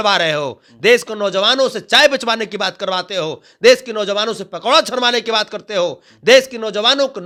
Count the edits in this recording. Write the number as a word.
zero